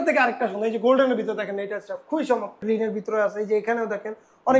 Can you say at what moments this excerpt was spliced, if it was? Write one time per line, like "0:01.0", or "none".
0:02.6